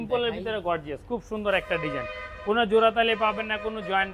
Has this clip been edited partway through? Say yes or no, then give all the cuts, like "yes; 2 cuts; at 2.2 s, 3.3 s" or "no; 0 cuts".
no; 0 cuts